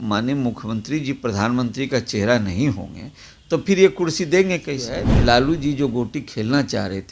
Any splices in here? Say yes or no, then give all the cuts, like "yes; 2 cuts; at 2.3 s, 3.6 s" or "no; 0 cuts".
yes; 1 cut; at 5.1 s